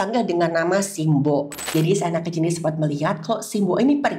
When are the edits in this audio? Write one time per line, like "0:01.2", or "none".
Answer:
0:01.6